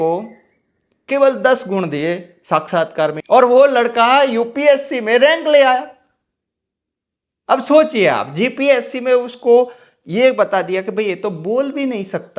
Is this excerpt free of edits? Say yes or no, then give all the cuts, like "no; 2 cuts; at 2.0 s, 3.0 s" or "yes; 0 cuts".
yes; 0 cuts